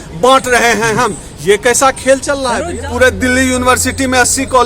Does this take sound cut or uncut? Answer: cut